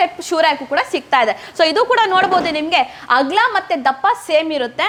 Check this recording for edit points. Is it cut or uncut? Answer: uncut